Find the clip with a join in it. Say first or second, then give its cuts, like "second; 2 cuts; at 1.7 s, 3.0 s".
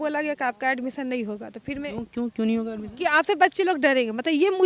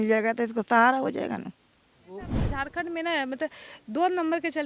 second; 1 cut; at 2.4 s